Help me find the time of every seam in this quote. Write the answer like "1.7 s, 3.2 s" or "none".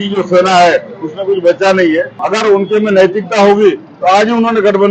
2.2 s